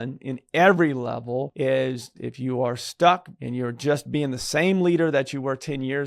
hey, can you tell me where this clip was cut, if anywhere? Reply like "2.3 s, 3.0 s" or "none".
1.5 s, 2.2 s, 3.4 s